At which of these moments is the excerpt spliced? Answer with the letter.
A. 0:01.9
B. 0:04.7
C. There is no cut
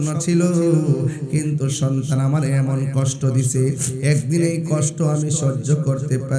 C